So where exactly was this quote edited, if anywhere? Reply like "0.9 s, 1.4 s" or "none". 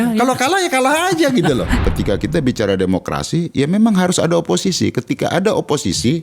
1.8 s